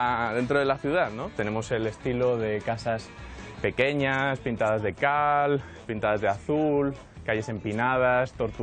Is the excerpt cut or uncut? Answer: cut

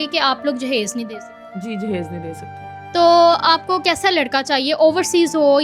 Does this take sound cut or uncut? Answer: cut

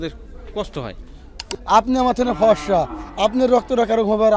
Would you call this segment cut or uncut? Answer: cut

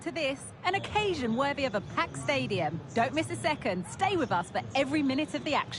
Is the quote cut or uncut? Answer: uncut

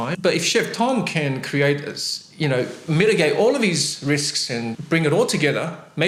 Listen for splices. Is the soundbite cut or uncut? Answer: uncut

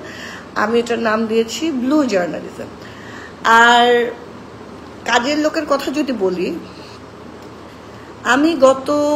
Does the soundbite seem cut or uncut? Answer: uncut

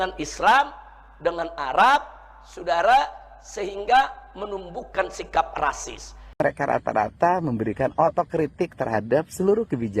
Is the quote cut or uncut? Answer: cut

